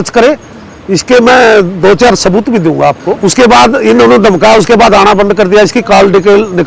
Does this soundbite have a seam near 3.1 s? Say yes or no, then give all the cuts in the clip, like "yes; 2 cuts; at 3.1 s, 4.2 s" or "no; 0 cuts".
yes; 1 cut; at 3.1 s